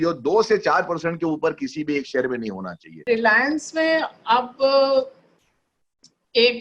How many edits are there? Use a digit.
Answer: 1